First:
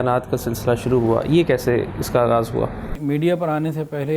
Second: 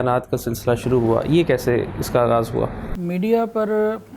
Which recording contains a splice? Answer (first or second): first